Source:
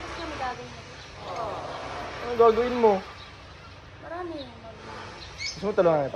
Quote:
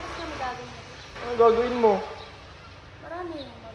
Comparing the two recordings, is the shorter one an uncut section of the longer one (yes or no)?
no